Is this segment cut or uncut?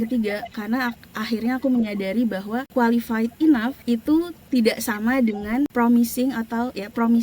cut